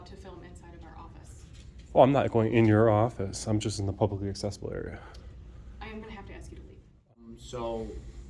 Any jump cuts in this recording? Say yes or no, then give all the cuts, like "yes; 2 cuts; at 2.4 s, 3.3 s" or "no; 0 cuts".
yes; 1 cut; at 7.4 s